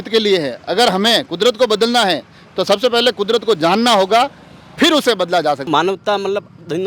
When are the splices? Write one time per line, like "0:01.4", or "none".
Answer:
0:05.7